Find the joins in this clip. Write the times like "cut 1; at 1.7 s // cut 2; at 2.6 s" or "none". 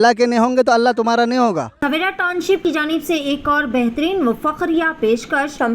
cut 1; at 1.7 s